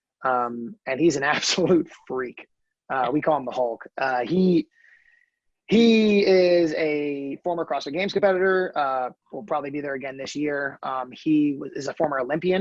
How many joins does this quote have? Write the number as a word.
zero